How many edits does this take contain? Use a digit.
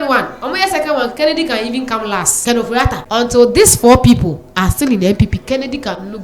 2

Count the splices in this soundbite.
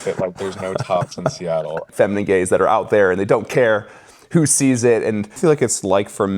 2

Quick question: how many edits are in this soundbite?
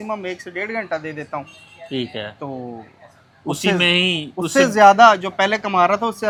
0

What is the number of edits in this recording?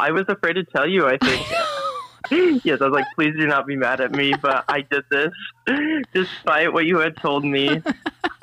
2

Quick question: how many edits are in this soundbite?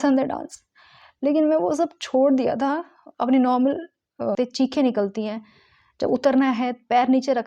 1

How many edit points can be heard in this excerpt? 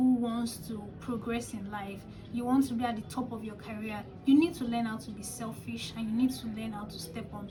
0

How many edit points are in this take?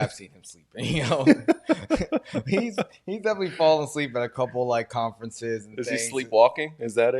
0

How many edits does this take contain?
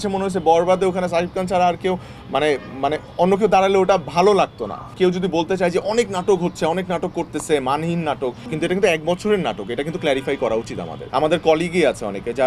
3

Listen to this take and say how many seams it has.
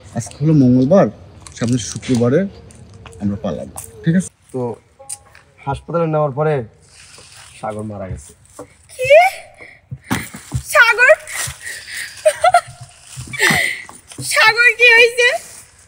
1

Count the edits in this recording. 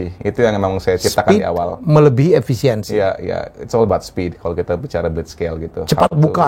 0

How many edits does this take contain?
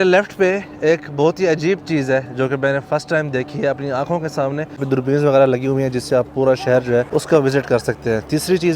2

